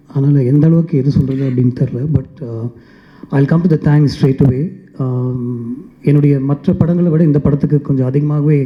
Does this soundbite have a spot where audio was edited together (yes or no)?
no